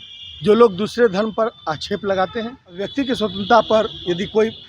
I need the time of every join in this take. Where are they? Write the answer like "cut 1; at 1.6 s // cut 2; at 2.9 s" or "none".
cut 1; at 2.8 s